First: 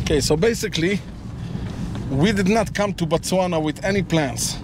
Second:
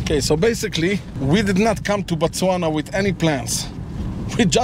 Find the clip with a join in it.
second; 1 cut; at 1.1 s

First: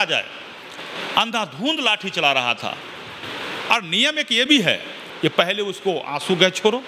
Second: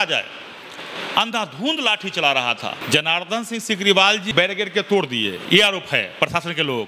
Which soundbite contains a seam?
second; 2 cuts; at 2.8 s, 4.2 s

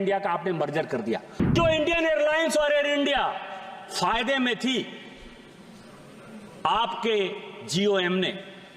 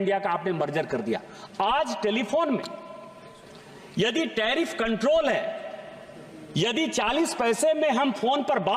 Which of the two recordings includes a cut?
first; 1 cut; at 1.5 s

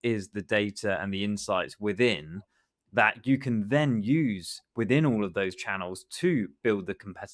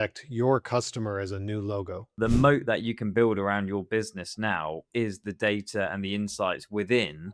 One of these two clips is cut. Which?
second; 1 cut; at 2.2 s

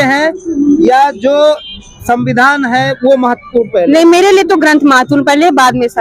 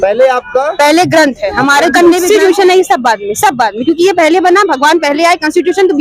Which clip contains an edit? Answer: second; 1 cut; at 1.9 s

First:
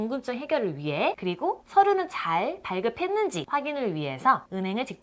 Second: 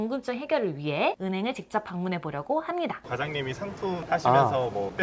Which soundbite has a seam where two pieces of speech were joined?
second; 2 cuts; at 1.2 s, 3.1 s

